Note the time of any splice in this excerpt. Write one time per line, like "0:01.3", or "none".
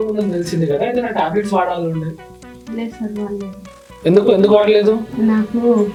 none